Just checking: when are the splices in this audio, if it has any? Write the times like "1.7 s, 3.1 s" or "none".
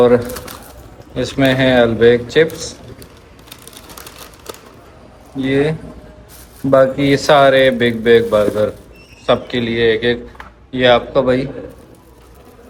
none